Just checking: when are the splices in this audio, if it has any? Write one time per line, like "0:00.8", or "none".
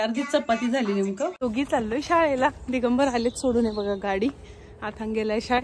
0:01.3